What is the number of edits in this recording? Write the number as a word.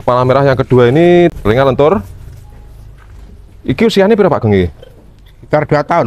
one